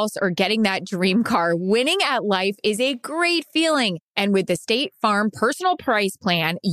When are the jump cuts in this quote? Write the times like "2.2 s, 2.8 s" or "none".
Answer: none